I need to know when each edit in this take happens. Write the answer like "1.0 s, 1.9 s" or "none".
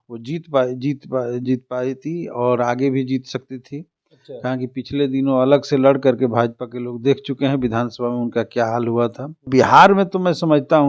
9.5 s